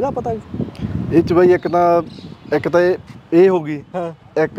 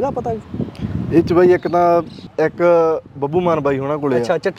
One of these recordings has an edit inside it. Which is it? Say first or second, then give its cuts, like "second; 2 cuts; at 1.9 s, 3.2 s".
second; 1 cut; at 2.2 s